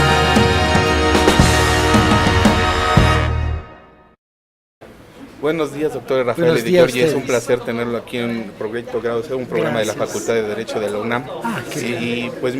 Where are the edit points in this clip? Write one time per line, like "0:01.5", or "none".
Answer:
0:02.1